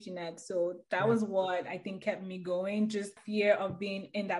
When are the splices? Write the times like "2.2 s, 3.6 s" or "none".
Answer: 3.2 s